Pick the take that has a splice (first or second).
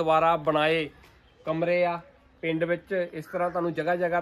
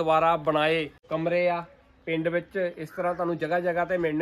second